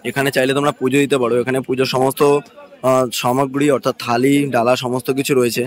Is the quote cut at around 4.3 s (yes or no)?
no